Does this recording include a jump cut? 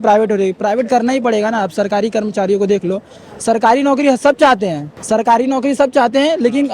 yes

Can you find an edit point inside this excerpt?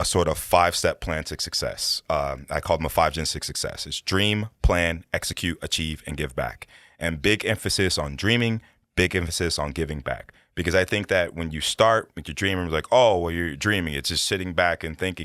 no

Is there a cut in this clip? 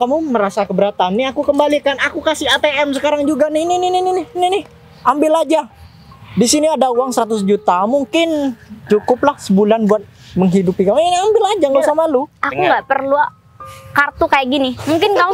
no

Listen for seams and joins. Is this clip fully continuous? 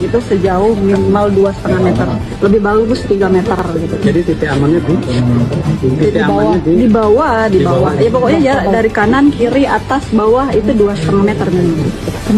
yes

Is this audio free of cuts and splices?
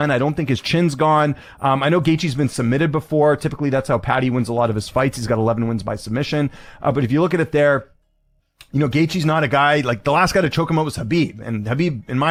yes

